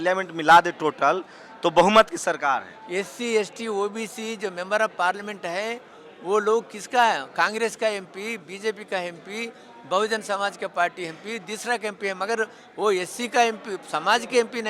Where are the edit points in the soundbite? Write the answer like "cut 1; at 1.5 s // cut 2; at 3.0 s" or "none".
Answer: none

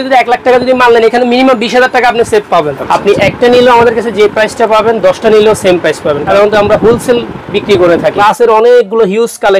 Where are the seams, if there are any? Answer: cut 1; at 2.8 s // cut 2; at 6.2 s // cut 3; at 8.2 s

